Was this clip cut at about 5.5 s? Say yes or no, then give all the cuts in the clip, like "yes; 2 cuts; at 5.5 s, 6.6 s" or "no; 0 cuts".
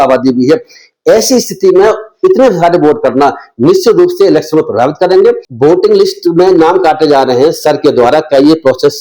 yes; 1 cut; at 5.5 s